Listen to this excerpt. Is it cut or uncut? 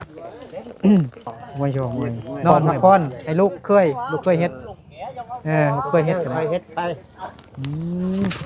cut